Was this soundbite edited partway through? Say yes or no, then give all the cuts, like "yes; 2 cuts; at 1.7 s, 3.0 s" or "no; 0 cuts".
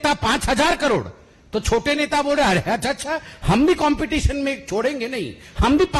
no; 0 cuts